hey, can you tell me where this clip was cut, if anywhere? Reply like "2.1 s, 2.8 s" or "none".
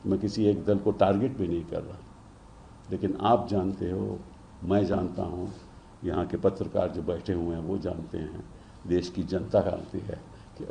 none